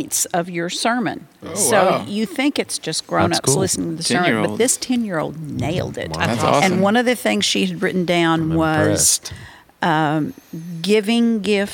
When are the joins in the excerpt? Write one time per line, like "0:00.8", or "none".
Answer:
none